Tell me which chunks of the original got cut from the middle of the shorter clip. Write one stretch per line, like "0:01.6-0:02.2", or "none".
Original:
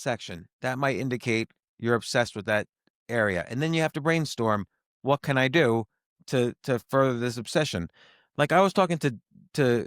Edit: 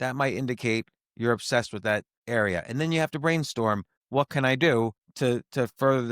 0:02.8-0:03.0
0:04.8-0:04.9
0:06.0-0:06.2